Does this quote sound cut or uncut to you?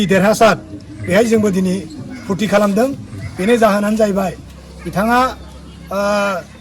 uncut